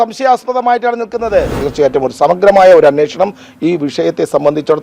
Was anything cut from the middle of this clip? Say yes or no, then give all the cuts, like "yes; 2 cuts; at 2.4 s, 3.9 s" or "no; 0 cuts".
yes; 1 cut; at 1.5 s